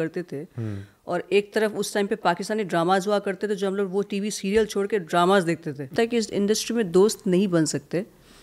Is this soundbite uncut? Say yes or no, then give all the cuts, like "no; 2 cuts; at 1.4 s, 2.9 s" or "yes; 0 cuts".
no; 1 cut; at 5.9 s